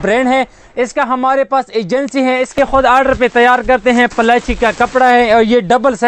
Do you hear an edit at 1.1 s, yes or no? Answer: no